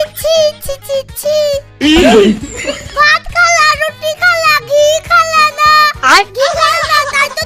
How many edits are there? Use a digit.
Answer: 0